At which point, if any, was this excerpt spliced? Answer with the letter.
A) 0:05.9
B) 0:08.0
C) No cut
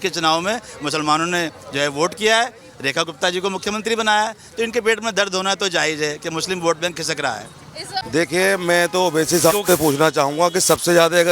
B